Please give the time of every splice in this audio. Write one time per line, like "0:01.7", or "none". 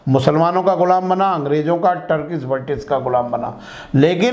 none